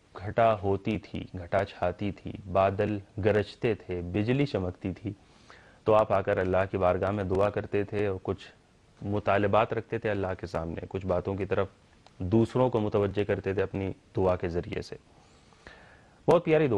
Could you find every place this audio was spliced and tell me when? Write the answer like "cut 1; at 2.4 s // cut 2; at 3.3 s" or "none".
cut 1; at 5.1 s